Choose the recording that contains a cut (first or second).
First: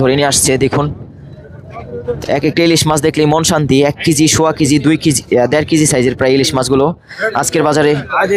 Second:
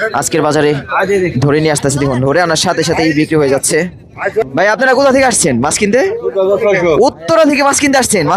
second